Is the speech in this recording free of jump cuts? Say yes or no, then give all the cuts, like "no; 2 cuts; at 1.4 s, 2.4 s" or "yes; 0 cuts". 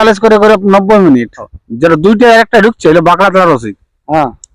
no; 1 cut; at 1.6 s